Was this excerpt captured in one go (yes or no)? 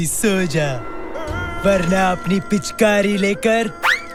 yes